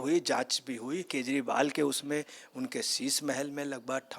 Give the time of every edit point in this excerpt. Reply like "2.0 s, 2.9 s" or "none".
1.1 s